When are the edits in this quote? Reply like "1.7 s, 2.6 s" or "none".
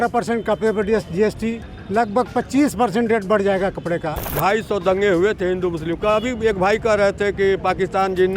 4.4 s